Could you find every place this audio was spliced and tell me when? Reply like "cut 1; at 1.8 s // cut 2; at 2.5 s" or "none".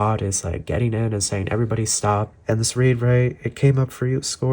cut 1; at 2.3 s